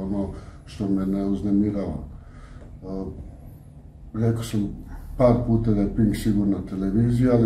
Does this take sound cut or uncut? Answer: uncut